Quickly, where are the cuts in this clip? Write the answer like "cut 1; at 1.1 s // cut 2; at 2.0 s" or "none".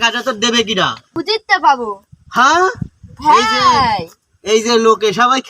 cut 1; at 1.1 s